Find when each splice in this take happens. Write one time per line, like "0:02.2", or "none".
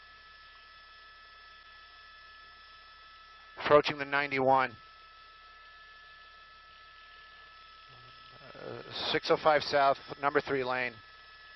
0:09.3